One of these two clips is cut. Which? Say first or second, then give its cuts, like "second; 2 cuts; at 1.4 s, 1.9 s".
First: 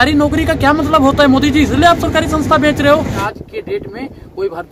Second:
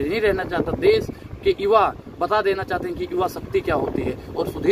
first; 1 cut; at 3.2 s